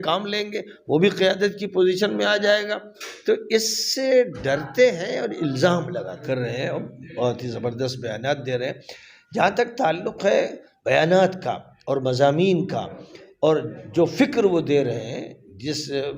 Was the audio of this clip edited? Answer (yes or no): yes